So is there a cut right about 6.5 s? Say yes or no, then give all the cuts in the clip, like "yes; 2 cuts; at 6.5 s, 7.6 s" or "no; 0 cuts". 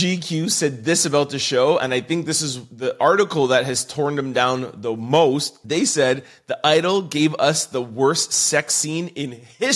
no; 0 cuts